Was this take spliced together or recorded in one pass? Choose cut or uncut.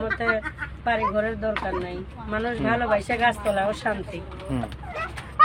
uncut